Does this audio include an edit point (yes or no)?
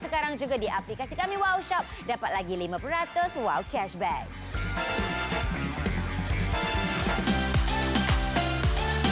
yes